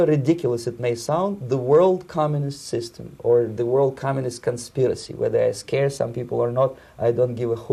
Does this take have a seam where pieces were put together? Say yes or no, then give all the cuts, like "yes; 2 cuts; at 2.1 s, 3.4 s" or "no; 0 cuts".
no; 0 cuts